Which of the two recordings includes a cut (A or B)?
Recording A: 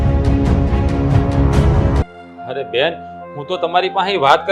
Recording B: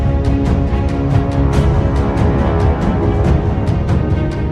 A